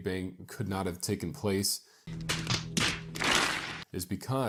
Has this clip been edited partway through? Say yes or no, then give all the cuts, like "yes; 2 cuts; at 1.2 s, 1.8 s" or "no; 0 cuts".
no; 0 cuts